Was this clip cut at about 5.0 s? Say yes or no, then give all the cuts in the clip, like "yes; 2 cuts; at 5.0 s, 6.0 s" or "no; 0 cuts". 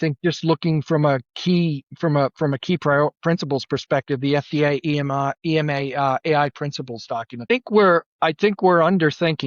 no; 1 cut; at 7.5 s